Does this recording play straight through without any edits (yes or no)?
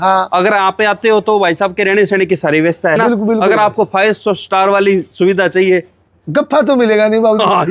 no